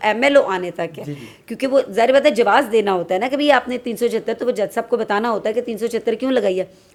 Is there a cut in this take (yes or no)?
no